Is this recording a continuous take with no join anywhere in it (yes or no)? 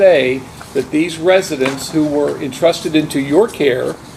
yes